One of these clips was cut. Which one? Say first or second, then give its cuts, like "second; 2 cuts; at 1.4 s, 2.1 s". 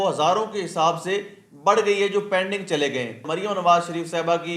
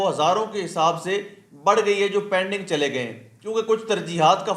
first; 1 cut; at 3.3 s